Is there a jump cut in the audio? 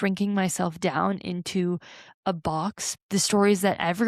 yes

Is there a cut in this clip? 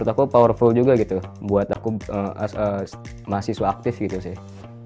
no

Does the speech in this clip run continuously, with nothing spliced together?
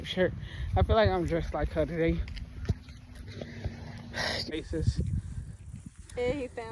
no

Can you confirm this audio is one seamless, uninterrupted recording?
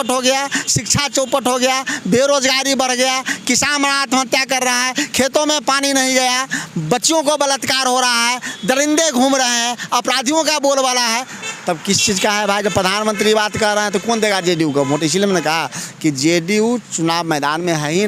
yes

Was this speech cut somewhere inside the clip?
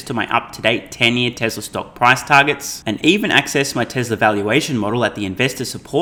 no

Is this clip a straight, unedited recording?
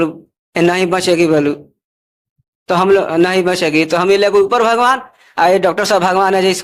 yes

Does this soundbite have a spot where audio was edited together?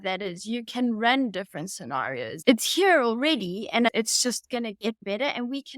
yes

